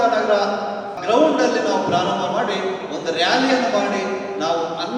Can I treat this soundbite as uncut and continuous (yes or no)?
no